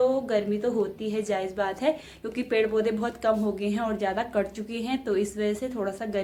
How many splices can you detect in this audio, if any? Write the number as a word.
zero